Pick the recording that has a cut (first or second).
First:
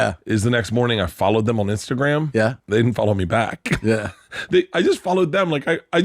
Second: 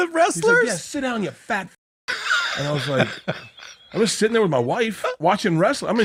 first